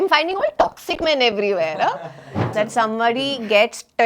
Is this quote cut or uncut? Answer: cut